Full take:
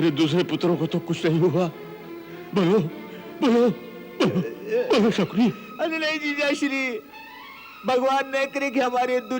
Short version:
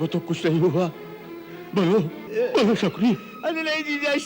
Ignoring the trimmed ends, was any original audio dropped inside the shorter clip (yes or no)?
yes